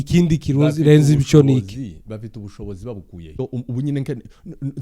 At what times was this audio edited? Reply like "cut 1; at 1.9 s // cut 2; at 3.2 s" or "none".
cut 1; at 3.4 s